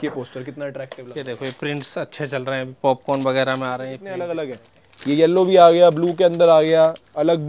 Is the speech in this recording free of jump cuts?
no; 2 cuts; at 1.0 s, 4.2 s

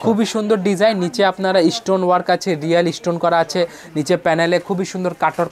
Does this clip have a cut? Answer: no; 0 cuts

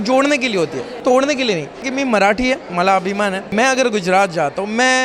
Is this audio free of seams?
no; 3 cuts; at 0.9 s, 1.9 s, 3.5 s

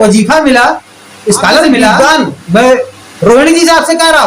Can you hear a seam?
yes; 1 cut; at 2.0 s

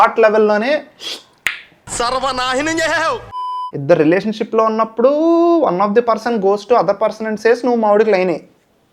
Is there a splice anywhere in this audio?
yes; 1 cut; at 3.7 s

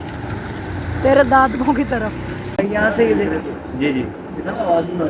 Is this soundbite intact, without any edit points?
no; 1 cut; at 2.6 s

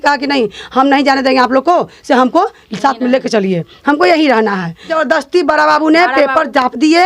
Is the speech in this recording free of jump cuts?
no; 1 cut; at 4.9 s

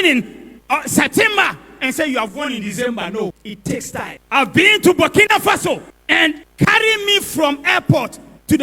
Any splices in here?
yes; 1 cut; at 4.2 s

